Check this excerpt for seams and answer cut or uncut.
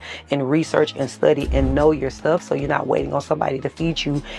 uncut